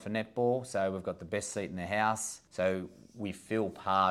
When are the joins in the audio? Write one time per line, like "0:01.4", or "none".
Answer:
0:02.4